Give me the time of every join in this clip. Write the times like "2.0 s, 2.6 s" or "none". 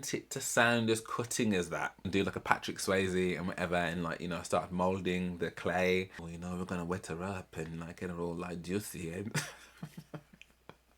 2.1 s, 6.3 s